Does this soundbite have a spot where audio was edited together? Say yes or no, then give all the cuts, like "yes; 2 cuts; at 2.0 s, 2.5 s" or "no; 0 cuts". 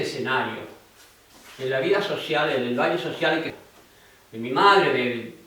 yes; 1 cut; at 3.5 s